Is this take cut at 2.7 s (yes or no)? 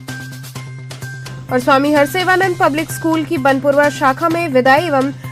no